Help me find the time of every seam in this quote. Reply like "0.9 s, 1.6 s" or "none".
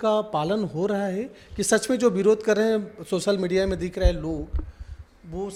none